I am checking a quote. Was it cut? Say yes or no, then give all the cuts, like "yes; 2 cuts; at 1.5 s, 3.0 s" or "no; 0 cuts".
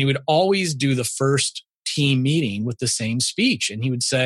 no; 0 cuts